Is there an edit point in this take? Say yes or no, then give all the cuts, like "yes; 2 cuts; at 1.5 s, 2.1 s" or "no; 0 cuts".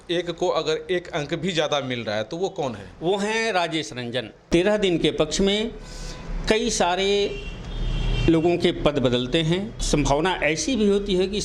yes; 2 cuts; at 4.5 s, 9.8 s